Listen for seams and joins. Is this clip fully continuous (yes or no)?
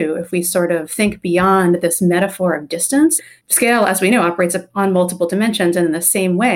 no